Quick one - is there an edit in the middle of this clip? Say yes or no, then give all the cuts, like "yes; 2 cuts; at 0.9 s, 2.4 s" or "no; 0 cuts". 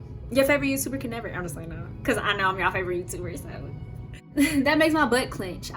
yes; 1 cut; at 4.3 s